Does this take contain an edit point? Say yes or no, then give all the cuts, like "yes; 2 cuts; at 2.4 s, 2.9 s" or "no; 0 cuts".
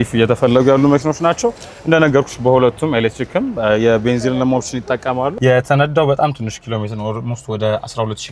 yes; 1 cut; at 5.3 s